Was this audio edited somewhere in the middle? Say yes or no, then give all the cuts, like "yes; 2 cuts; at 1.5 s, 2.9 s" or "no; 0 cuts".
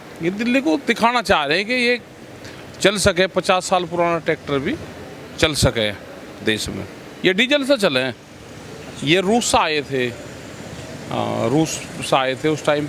no; 0 cuts